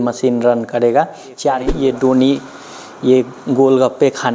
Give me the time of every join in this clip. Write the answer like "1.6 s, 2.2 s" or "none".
1.7 s